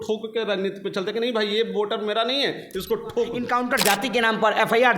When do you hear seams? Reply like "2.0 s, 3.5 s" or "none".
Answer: 3.4 s

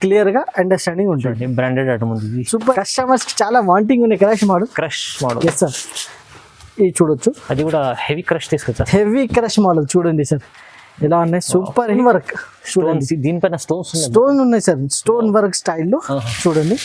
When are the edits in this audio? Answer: 2.7 s, 11.9 s

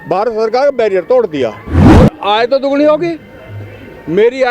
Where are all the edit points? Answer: 1.7 s

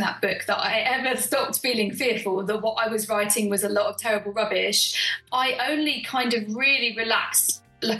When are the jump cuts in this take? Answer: 5.1 s

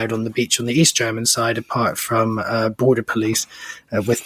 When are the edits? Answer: none

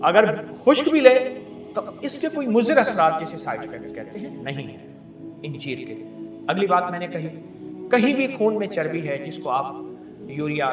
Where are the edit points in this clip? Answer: none

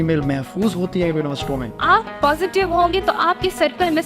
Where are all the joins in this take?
1.7 s

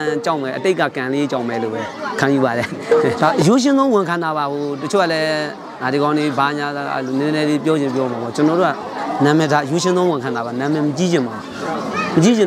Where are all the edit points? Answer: 3.1 s

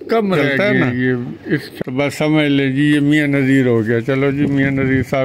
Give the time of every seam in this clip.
1.7 s

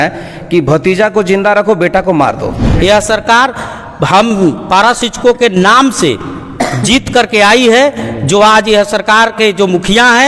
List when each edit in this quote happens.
2.7 s

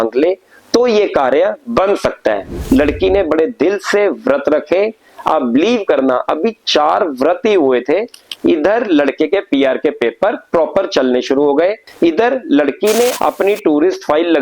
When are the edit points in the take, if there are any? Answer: 2.5 s, 11.9 s, 13.1 s

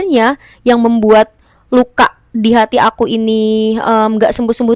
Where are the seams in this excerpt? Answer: none

